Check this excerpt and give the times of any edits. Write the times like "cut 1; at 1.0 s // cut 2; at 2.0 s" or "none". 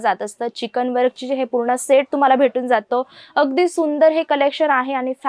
none